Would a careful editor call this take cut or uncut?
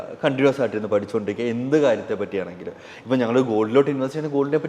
uncut